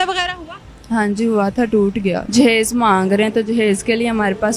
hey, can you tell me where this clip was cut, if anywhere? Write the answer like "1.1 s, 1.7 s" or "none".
2.2 s